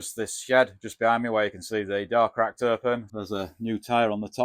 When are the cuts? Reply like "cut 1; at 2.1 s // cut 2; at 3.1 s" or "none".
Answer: cut 1; at 3.1 s